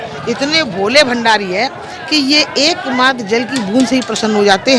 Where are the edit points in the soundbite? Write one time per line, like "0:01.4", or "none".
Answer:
none